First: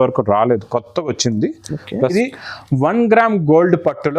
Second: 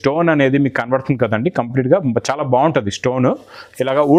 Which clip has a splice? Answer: first; 1 cut; at 2.0 s

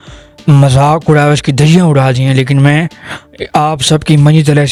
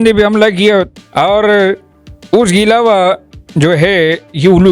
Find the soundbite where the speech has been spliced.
second; 1 cut; at 1.0 s

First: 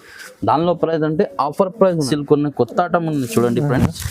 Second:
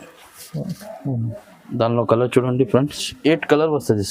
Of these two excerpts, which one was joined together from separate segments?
first; 1 cut; at 2.0 s

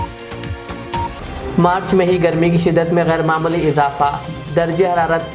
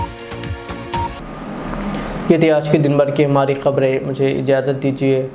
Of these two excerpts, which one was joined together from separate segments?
first; 1 cut; at 1.1 s

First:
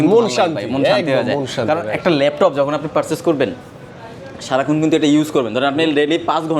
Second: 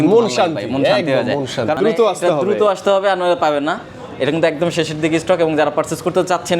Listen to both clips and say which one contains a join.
second; 1 cut; at 1.8 s

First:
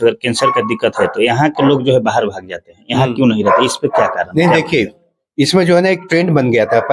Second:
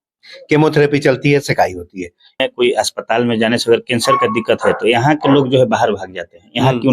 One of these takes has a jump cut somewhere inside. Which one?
second; 1 cut; at 2.4 s

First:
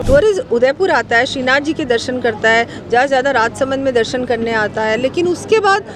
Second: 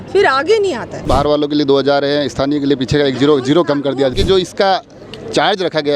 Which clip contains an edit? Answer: second; 2 cuts; at 0.9 s, 4.1 s

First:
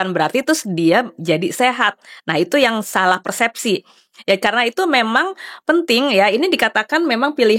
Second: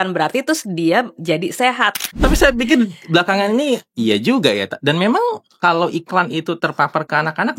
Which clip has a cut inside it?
second; 1 cut; at 2.1 s

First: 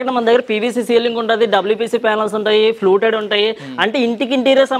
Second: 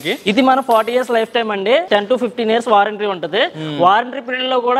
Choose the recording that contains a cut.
second; 1 cut; at 1.8 s

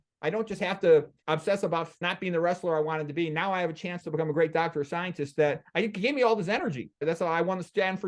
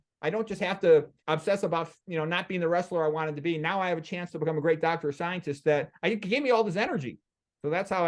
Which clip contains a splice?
first; 2 cuts; at 2.0 s, 7.0 s

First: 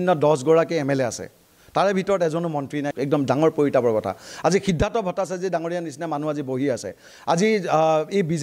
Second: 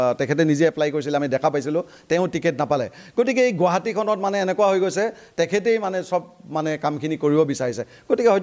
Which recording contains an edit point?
first; 1 cut; at 2.9 s

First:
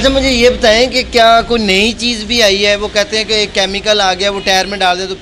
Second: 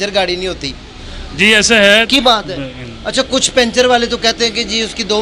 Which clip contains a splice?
second; 1 cut; at 2.1 s

